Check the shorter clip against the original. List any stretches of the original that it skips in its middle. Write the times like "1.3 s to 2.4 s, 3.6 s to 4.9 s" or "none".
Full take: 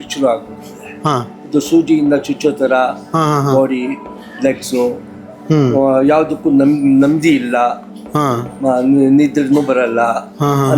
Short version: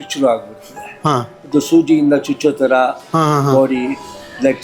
none